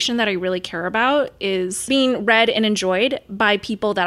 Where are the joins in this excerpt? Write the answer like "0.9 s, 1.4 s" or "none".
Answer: 1.9 s

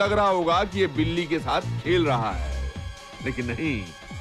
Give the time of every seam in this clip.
none

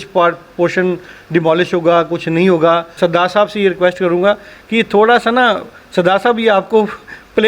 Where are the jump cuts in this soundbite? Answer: 2.9 s

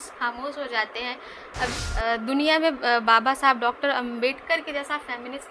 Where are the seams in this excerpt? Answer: 1.7 s

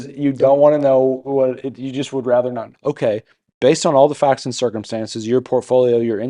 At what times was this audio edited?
2.7 s

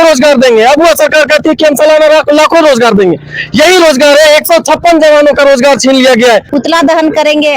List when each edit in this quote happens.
6.5 s

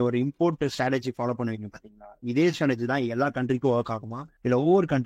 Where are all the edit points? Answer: none

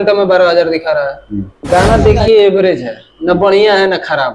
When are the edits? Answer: 1.5 s

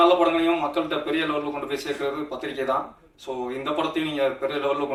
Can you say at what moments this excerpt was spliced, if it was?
none

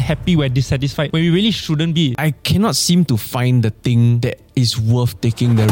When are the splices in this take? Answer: 1.1 s, 2.2 s, 4.2 s

